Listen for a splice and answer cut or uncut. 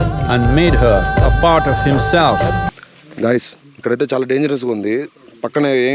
cut